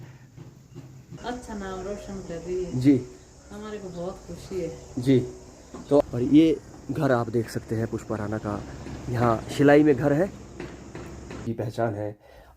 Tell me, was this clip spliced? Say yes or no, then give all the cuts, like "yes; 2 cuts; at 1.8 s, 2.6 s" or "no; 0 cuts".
yes; 3 cuts; at 1.2 s, 6.0 s, 11.5 s